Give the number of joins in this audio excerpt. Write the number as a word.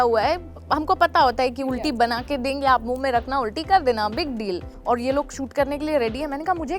one